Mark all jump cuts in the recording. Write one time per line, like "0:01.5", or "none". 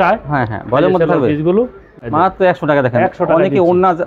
0:01.9